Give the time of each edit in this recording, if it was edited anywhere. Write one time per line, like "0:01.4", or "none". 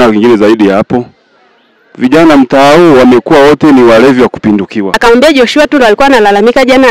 0:04.9